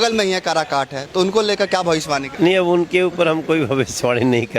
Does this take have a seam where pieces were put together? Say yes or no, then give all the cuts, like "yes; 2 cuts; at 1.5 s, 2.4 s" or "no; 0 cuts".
yes; 1 cut; at 2.3 s